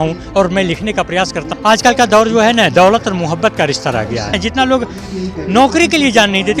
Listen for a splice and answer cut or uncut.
cut